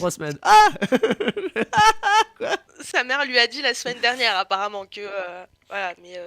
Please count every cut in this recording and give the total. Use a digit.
0